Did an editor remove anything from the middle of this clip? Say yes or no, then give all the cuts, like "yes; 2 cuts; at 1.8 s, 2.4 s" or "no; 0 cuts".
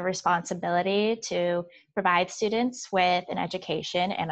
no; 0 cuts